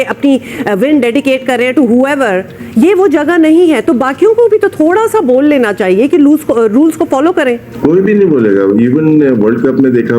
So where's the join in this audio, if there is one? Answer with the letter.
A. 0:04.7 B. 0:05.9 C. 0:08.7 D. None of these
D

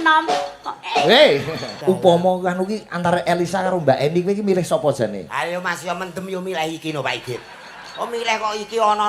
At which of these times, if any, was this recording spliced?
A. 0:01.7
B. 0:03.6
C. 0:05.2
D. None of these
A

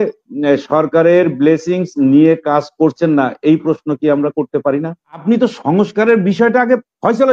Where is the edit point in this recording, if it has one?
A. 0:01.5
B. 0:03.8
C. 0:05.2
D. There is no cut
C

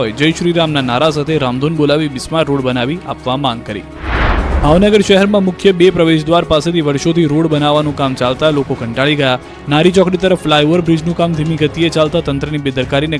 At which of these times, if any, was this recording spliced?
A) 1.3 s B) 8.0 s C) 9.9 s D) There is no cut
C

